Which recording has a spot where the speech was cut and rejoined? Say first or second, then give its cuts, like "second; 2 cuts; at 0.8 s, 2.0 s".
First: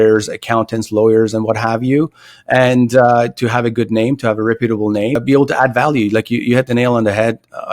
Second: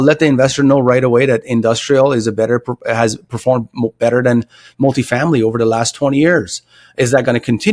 first; 1 cut; at 5.2 s